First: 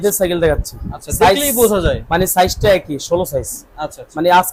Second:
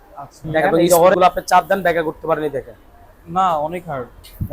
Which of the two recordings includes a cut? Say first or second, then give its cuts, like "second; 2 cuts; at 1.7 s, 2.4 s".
second; 1 cut; at 1.1 s